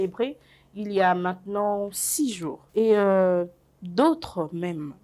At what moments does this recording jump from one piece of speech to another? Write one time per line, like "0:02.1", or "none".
0:02.6